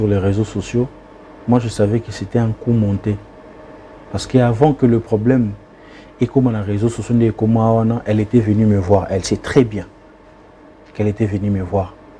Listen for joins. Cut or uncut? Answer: uncut